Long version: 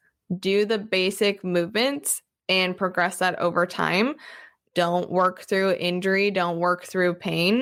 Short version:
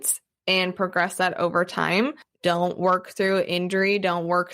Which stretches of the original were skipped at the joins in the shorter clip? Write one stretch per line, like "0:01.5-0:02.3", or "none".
0:04.3-0:04.6

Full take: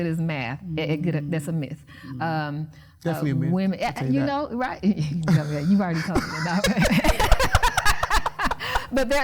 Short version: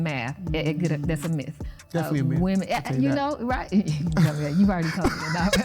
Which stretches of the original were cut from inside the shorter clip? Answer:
0:01.9-0:02.8

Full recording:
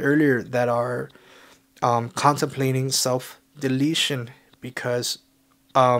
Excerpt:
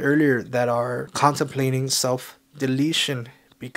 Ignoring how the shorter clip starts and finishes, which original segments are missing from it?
0:01.1-0:02.1

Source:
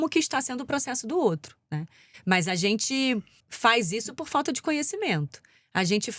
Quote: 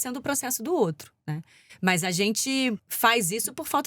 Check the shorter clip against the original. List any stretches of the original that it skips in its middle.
0:03.3-0:03.5

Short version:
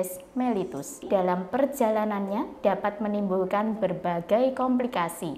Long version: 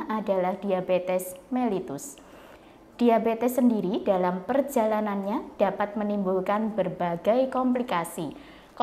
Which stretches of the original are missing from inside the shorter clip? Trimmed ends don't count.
0:02.2-0:04.0

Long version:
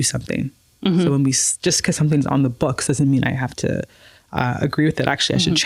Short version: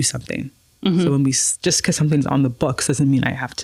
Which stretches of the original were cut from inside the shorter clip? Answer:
none

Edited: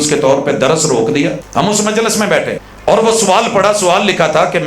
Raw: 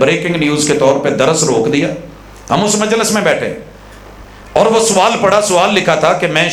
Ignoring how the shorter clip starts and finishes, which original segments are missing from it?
0:02.0-0:02.4
0:03.6-0:04.3

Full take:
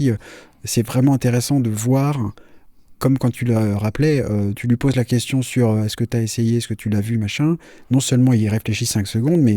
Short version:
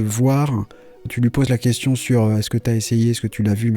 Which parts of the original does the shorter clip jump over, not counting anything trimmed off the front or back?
0:02.8-0:04.6

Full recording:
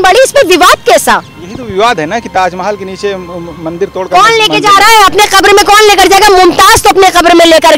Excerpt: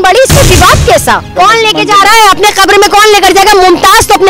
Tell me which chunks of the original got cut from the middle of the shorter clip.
0:01.3-0:04.0

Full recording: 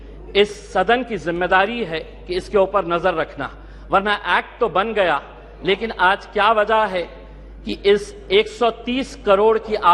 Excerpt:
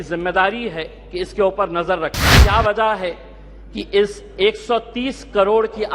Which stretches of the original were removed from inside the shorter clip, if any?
0:03.5-0:06.3

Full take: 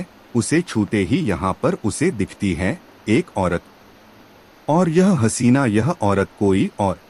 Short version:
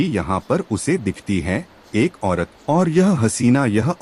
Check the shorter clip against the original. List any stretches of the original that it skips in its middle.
0:03.7-0:04.6

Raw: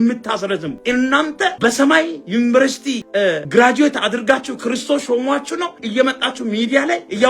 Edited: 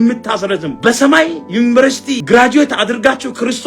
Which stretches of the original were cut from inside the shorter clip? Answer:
0:00.8-0:01.6
0:03.0-0:03.4

